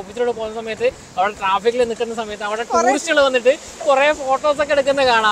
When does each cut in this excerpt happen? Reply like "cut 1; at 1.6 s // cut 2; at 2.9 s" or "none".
none